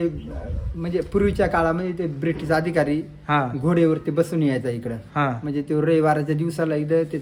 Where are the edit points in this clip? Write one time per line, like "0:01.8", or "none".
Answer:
none